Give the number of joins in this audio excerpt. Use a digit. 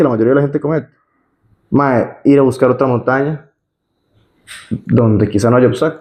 0